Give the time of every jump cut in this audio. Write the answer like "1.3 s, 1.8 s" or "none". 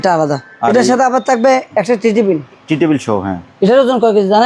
none